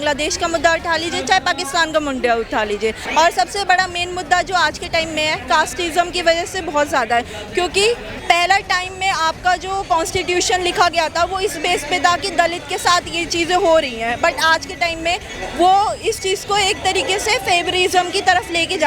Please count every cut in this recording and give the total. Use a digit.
3